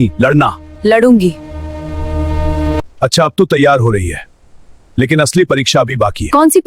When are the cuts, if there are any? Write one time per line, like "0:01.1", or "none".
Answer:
0:02.9